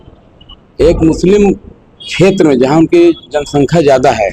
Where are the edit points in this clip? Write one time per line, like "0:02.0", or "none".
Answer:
none